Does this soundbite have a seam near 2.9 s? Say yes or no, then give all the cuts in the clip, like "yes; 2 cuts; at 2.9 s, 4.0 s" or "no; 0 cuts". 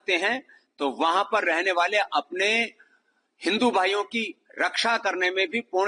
no; 0 cuts